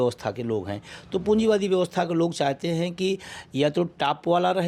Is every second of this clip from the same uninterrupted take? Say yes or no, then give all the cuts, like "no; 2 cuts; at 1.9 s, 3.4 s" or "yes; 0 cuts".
yes; 0 cuts